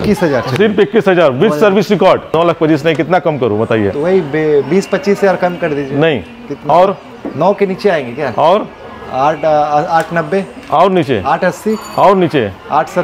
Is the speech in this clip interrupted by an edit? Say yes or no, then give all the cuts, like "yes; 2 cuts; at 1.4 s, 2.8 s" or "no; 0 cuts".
yes; 1 cut; at 2.3 s